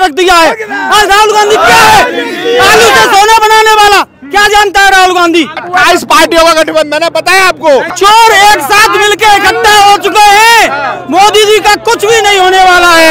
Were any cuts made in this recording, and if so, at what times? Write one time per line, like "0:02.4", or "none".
0:05.6
0:07.9